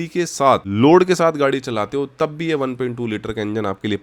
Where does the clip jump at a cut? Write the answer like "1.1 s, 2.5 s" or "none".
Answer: none